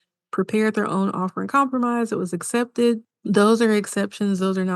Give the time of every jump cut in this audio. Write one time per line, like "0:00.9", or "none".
0:03.1